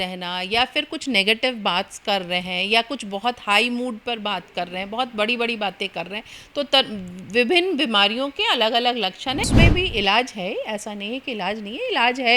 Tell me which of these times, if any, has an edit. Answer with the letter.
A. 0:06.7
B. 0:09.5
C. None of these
B